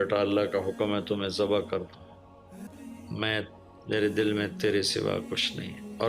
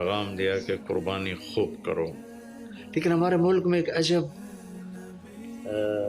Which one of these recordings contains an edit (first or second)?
first